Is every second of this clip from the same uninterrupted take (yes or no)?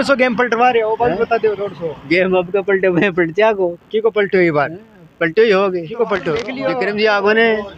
no